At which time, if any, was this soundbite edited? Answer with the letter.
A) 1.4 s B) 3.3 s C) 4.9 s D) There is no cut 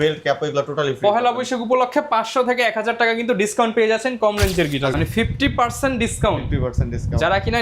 C